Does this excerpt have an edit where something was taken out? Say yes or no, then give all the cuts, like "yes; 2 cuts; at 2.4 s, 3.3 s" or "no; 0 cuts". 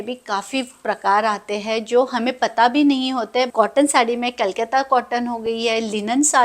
yes; 1 cut; at 3.6 s